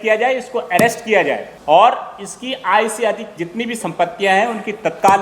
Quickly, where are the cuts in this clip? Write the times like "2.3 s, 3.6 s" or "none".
1.5 s

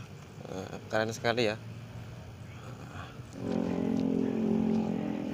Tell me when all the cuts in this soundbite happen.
3.4 s

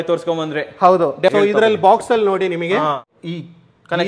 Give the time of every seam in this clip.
1.3 s

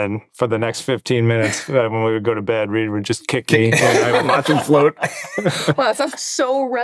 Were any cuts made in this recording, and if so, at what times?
5.3 s

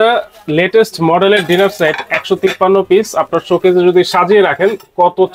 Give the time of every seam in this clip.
none

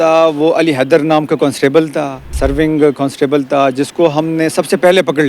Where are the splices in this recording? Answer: 2.3 s

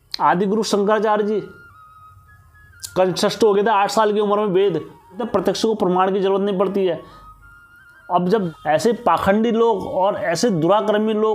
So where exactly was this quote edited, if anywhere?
5.2 s, 8.5 s

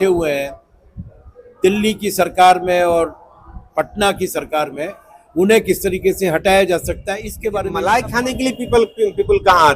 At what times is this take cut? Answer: 7.7 s

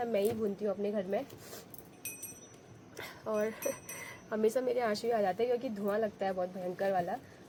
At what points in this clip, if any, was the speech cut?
none

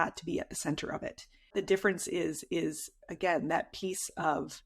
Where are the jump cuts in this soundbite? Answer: 1.5 s

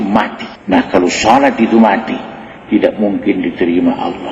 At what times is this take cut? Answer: none

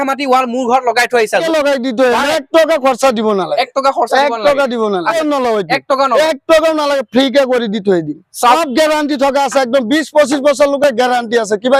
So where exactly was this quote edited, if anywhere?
1.4 s, 5.1 s, 8.6 s

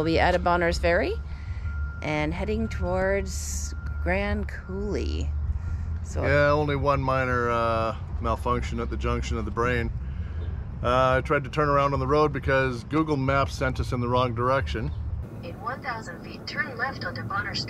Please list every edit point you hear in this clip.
none

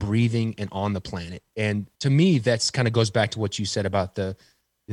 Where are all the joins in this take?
1.6 s

